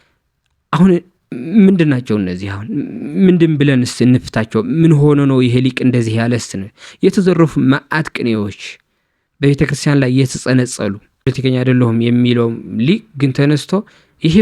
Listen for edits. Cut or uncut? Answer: cut